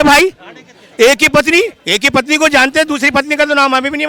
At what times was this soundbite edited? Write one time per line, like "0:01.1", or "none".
0:01.8